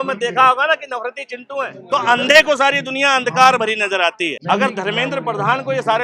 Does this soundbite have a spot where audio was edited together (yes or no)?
yes